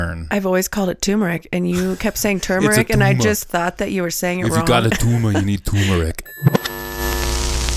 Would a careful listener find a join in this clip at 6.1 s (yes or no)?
yes